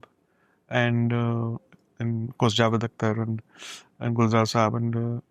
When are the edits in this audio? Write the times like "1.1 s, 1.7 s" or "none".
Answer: none